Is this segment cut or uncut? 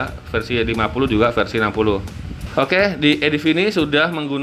cut